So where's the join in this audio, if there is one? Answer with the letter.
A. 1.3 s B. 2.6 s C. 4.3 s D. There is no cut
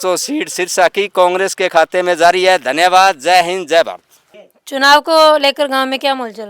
D